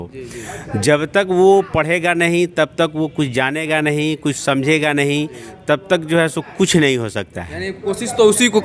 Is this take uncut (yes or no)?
yes